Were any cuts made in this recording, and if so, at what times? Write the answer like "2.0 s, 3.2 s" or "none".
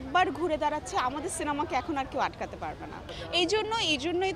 none